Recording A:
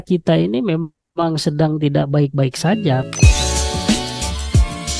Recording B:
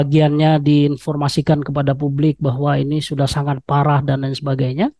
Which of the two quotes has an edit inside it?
A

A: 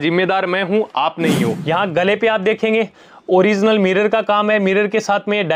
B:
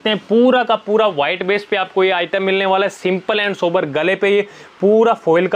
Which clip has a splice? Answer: A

